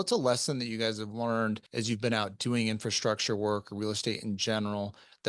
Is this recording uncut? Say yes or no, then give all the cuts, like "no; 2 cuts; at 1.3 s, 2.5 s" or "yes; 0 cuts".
no; 1 cut; at 1.7 s